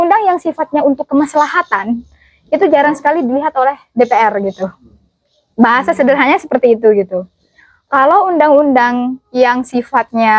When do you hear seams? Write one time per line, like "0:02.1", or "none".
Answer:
none

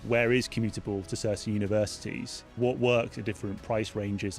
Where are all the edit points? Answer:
0:02.5

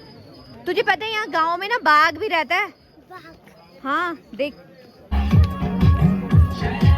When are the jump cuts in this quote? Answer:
0:05.0

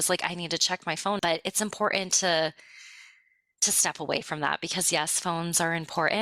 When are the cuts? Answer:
0:01.2

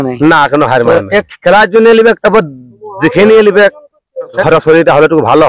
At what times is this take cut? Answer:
0:01.3
0:04.4

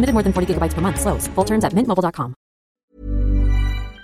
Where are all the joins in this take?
0:02.8

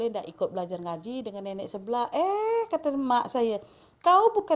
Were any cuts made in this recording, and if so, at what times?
none

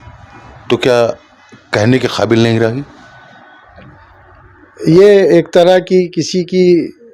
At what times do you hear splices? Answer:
none

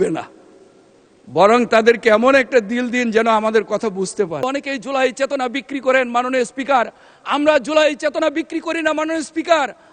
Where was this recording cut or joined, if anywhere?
0:04.4

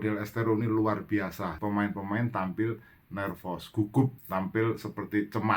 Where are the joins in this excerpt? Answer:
0:01.6
0:04.2

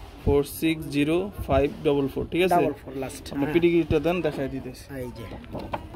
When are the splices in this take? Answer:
none

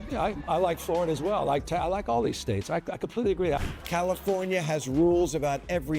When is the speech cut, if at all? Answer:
0:03.6

